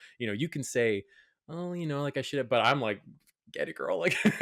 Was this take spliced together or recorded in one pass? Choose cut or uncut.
uncut